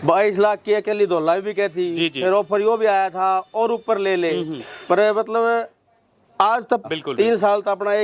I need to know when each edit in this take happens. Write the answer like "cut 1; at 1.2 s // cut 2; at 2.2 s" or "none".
cut 1; at 6.8 s